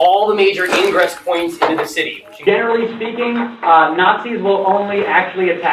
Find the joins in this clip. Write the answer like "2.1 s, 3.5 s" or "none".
2.3 s